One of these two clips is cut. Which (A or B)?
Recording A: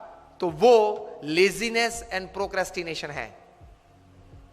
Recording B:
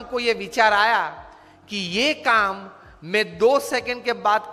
A